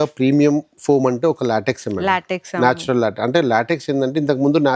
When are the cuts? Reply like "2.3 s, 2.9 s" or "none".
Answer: none